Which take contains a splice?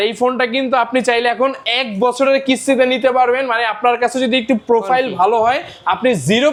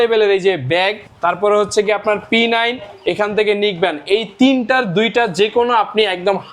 second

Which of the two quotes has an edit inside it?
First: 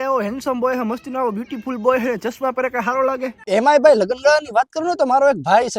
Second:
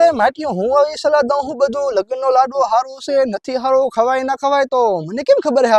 first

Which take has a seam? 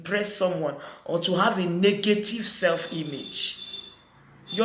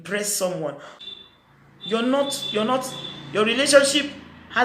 second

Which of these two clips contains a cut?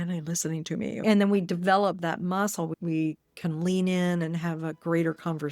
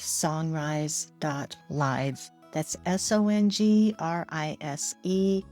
first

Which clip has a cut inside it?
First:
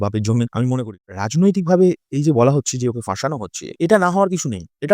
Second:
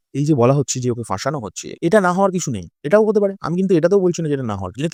first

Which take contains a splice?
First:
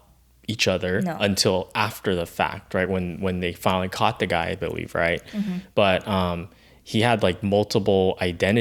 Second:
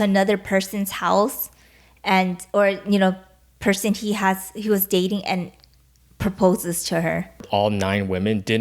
second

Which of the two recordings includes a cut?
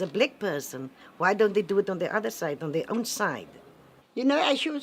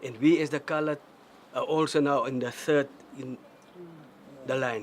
second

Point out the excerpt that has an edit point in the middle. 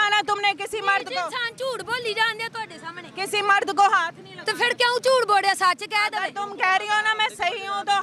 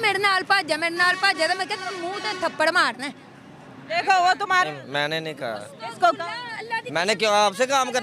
second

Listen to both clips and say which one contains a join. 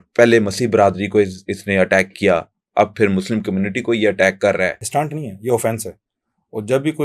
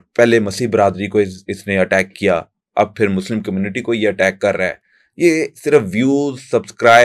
first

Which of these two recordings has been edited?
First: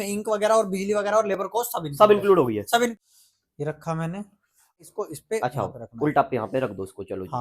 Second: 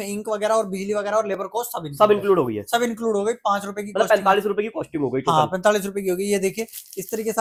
first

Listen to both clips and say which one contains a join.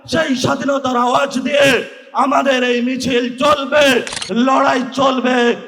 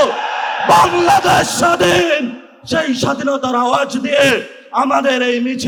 first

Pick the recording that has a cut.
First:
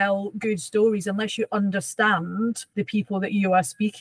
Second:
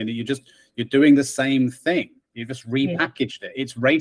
first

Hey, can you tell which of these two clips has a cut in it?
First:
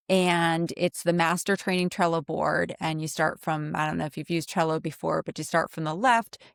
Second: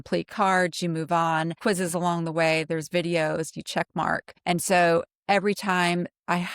second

